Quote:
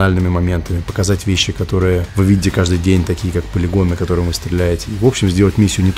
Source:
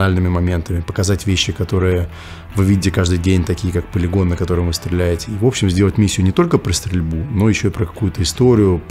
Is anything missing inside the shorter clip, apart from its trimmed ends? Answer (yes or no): yes